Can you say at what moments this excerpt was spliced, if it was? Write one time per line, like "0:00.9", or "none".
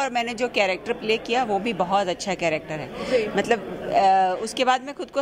none